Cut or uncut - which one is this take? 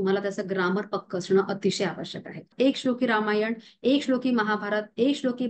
cut